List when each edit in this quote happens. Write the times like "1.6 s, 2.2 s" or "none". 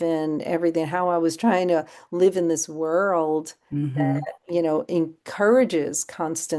3.6 s